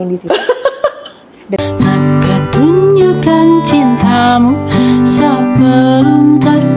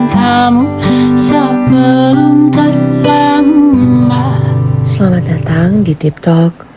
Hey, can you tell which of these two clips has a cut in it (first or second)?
first